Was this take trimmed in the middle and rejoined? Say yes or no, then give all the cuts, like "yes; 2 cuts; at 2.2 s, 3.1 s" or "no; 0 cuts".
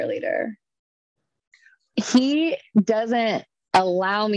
no; 0 cuts